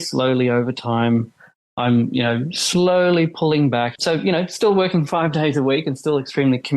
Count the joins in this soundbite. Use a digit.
1